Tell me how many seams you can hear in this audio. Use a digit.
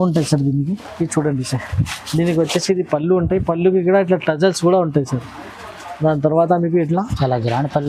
0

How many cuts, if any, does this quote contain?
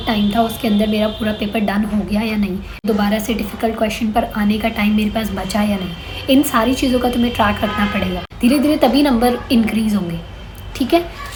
0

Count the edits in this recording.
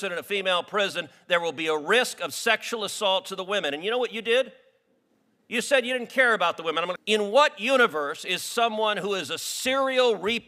1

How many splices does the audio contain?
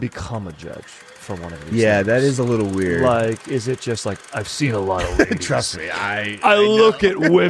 0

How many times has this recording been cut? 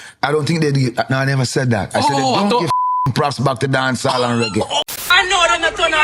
1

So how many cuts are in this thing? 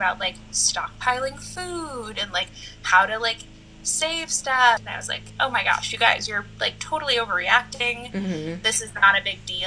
1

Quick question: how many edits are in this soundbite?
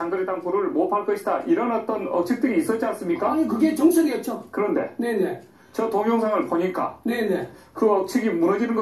1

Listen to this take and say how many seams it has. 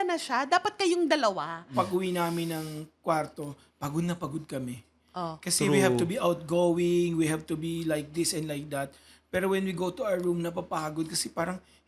1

